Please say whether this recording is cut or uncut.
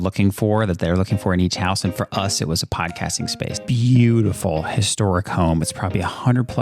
cut